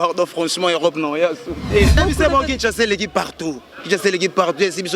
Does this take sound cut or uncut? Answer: cut